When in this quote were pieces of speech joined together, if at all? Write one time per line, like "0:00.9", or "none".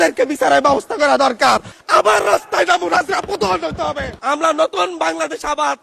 0:01.8
0:04.2

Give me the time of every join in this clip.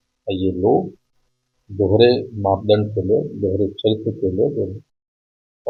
none

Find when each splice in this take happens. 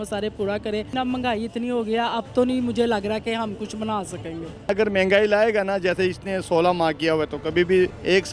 0:00.9
0:04.7

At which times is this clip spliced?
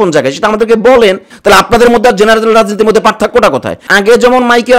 0:01.3
0:03.8

